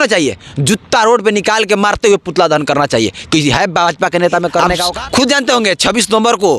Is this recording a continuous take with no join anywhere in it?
no; 1 cut; at 4.8 s

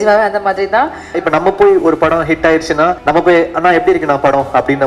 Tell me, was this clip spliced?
yes; 2 cuts; at 1.2 s, 3.0 s

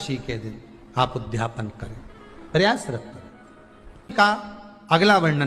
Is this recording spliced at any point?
yes; 1 cut; at 4.1 s

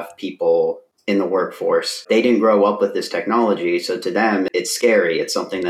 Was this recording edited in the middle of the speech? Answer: yes; 3 cuts; at 0.9 s, 2.0 s, 4.5 s

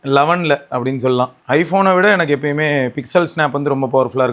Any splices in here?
yes; 1 cut; at 1.4 s

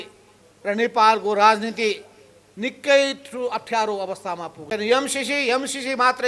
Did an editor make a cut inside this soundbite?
yes; 1 cut; at 4.5 s

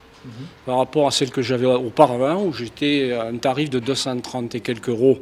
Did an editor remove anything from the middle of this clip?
no; 0 cuts

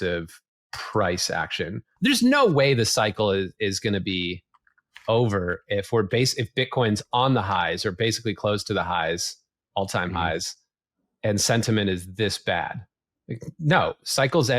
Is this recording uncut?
no; 1 cut; at 1.8 s

